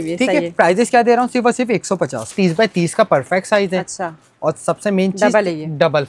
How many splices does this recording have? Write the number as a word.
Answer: one